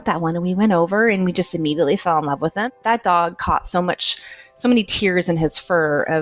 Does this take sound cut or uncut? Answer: cut